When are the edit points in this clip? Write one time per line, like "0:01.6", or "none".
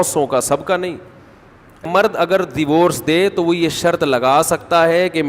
0:01.8